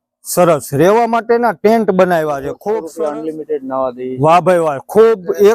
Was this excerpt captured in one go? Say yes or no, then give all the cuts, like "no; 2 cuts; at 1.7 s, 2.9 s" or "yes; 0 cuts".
no; 1 cut; at 2.9 s